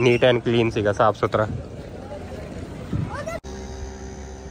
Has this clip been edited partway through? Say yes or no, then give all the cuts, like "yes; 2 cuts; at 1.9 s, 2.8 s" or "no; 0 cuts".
yes; 1 cut; at 3.4 s